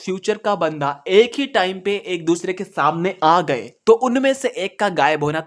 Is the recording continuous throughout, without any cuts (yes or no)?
yes